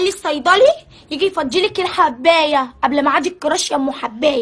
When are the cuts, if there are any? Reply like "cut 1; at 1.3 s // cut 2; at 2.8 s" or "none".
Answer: none

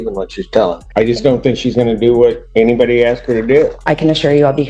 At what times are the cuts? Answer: cut 1; at 0.8 s // cut 2; at 2.4 s // cut 3; at 3.8 s

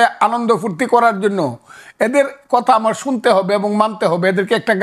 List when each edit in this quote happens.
none

